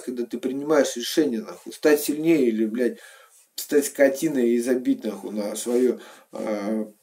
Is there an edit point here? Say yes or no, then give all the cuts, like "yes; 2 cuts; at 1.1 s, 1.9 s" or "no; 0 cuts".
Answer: no; 0 cuts